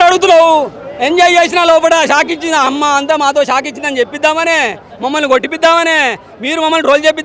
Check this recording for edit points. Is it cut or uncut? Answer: uncut